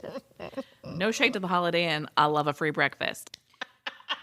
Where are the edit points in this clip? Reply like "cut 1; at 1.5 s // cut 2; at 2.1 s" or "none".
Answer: cut 1; at 3.2 s